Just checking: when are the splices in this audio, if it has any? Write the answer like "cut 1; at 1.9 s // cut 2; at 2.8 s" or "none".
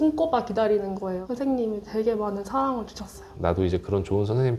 cut 1; at 1.2 s // cut 2; at 3.3 s

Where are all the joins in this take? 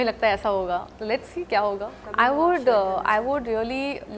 cut 1; at 2.0 s

